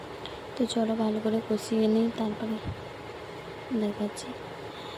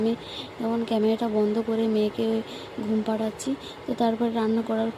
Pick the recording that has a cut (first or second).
first